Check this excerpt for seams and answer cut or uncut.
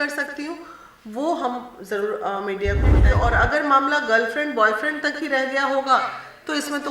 cut